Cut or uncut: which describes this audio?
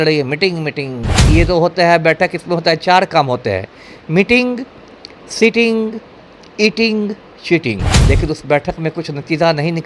cut